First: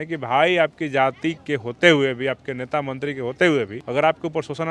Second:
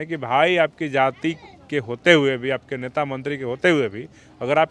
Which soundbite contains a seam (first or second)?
first